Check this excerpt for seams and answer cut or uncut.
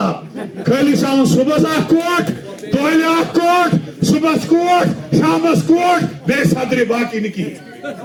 uncut